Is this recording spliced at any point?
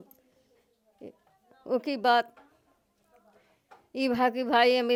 no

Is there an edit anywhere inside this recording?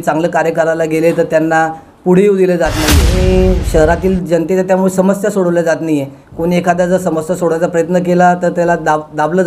yes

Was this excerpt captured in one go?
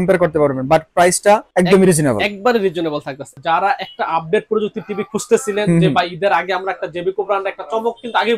no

